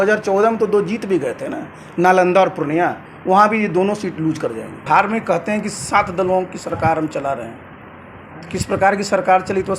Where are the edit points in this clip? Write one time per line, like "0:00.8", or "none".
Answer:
0:04.9